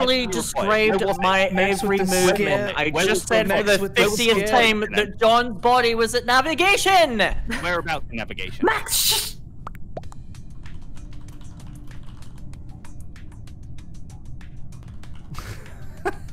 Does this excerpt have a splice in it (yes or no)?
no